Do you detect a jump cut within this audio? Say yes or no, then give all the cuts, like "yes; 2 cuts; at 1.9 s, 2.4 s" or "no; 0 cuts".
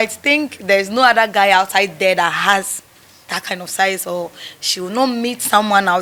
no; 0 cuts